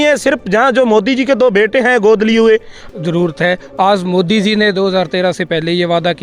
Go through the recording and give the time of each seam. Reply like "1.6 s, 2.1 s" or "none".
2.8 s